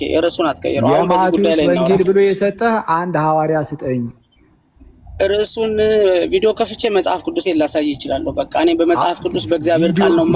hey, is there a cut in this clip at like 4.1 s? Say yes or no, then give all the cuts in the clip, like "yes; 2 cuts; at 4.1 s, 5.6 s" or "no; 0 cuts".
no; 0 cuts